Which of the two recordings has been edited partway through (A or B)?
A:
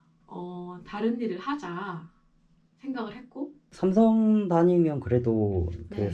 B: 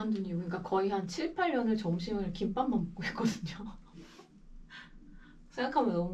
A